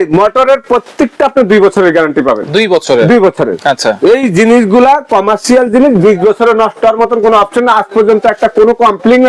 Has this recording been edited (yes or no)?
no